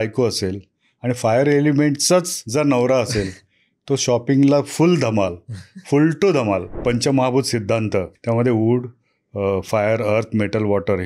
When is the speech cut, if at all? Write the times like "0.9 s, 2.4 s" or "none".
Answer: 2.4 s, 6.7 s, 8.1 s